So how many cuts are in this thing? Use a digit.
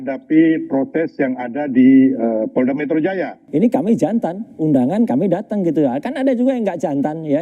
1